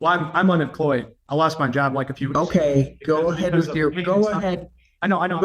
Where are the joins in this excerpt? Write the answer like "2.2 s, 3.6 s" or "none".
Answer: 1.2 s

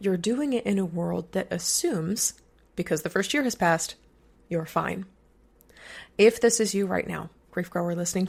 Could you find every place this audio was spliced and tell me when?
none

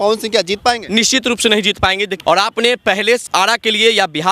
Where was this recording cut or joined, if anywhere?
2.1 s, 3.3 s

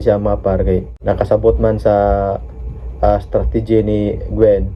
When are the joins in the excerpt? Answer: 0.9 s

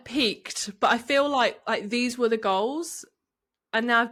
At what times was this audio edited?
none

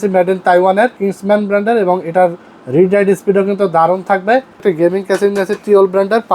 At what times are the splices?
1.0 s, 4.6 s

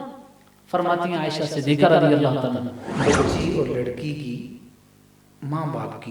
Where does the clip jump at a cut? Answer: none

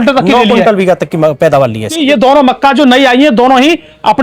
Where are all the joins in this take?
2.0 s

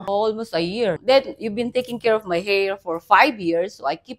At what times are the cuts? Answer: 1.0 s

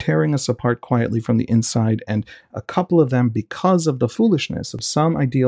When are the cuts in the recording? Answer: 4.5 s

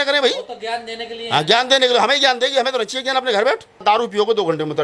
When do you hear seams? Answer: 3.8 s

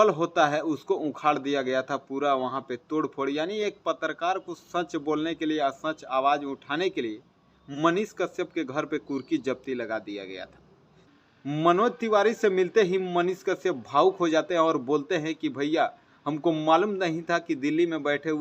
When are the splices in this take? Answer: 11.2 s

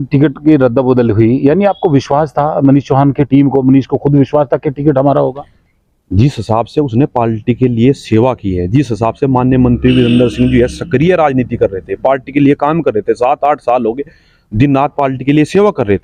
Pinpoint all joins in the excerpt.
none

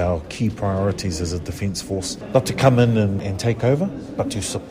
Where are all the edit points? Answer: 2.2 s, 3.2 s

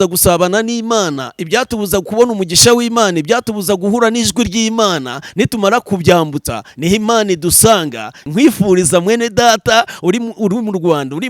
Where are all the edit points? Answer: 8.2 s

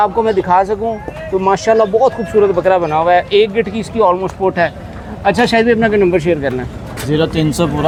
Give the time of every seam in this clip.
none

